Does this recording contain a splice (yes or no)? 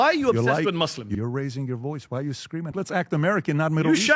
yes